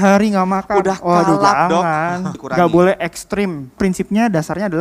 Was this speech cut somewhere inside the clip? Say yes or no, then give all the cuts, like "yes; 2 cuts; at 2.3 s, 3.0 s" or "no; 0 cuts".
yes; 2 cuts; at 2.4 s, 3.8 s